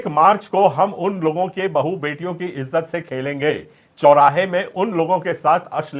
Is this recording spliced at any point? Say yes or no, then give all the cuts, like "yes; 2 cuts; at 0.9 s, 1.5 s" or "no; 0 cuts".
no; 0 cuts